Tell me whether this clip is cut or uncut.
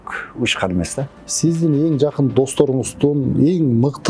cut